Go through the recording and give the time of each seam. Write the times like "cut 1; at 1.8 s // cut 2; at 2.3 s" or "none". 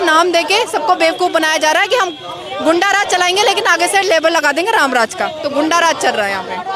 none